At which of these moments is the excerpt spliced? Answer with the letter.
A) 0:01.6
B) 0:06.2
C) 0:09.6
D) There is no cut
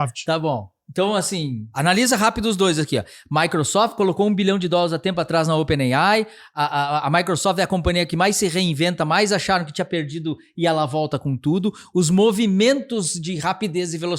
A